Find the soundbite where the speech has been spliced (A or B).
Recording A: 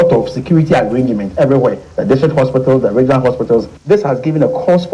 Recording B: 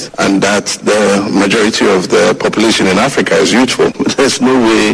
B